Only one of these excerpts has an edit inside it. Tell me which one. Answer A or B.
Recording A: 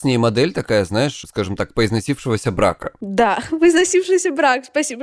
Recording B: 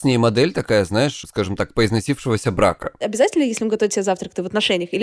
B